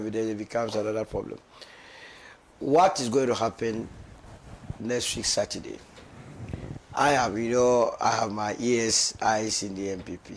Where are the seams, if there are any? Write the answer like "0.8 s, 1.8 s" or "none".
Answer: 8.3 s